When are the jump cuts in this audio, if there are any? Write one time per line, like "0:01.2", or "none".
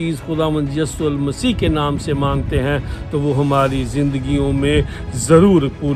none